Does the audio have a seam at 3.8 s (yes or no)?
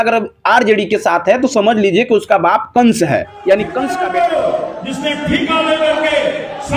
yes